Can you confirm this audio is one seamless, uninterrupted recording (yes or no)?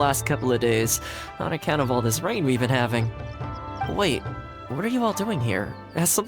no